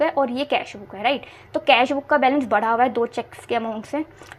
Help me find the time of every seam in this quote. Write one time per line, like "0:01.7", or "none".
none